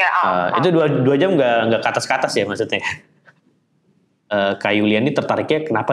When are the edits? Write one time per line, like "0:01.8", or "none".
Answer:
0:04.3